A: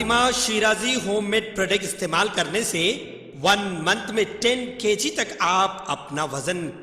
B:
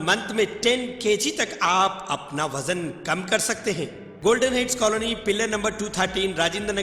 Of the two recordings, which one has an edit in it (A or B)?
B